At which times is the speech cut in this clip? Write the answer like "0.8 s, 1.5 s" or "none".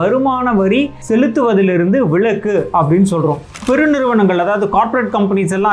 1.0 s, 3.6 s